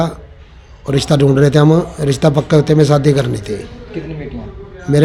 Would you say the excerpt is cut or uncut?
uncut